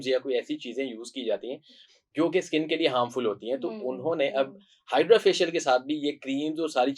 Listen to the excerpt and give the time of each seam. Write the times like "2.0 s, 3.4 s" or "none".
none

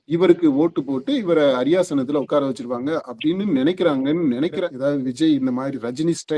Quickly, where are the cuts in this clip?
4.6 s

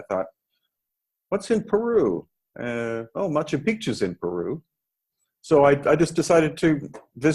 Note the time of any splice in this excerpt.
none

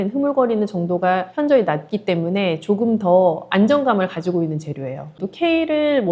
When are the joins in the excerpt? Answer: 5.1 s

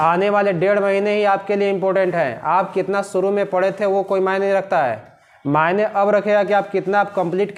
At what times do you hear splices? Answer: none

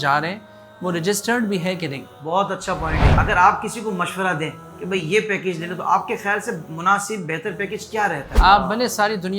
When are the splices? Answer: 3.0 s, 8.3 s

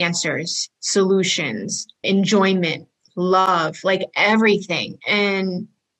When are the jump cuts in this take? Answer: 2.0 s, 3.5 s

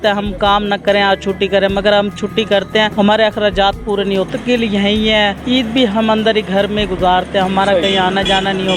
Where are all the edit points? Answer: 2.9 s, 4.3 s, 5.4 s

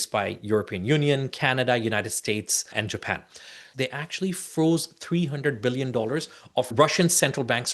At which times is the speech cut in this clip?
2.6 s, 3.7 s, 6.7 s

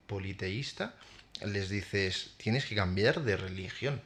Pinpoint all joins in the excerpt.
none

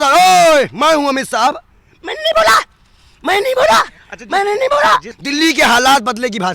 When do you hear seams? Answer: 5.2 s

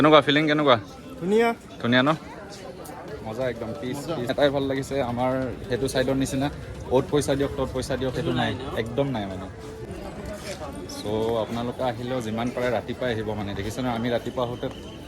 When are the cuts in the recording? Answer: 4.3 s, 9.8 s

